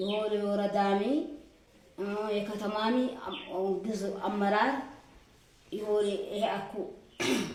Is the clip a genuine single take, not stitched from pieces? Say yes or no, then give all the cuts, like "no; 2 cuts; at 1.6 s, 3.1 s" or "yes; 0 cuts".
yes; 0 cuts